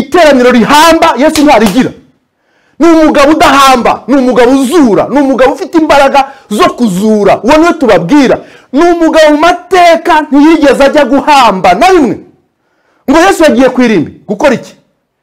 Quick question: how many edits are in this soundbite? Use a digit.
0